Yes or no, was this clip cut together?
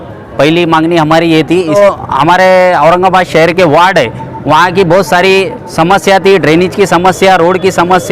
yes